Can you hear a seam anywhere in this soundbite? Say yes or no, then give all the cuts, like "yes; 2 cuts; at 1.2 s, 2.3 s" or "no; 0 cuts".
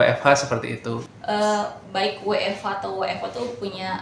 yes; 1 cut; at 1.0 s